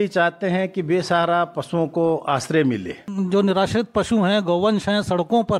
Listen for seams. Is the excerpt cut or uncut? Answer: cut